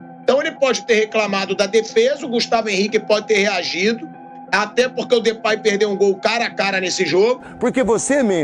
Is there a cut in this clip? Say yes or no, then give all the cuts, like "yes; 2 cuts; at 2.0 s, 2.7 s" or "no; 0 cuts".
yes; 1 cut; at 7.5 s